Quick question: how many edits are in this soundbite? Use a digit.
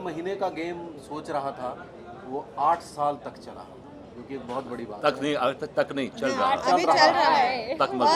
0